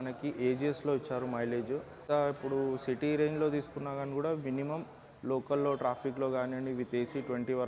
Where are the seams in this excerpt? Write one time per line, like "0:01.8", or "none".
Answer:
0:02.0